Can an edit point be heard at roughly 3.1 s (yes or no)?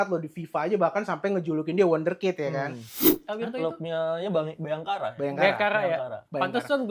yes